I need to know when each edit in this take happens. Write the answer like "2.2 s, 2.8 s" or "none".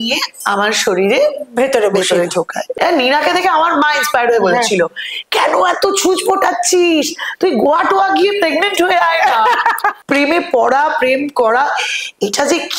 2.7 s, 10.0 s